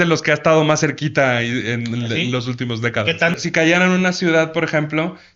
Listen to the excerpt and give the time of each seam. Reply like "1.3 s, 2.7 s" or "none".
3.4 s